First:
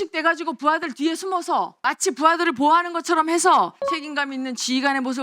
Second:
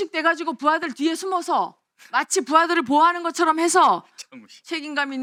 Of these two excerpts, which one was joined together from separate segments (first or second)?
first